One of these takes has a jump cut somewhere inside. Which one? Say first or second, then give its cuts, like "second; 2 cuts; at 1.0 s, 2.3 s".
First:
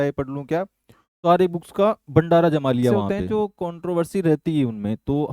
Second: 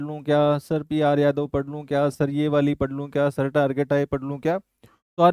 first; 1 cut; at 3.0 s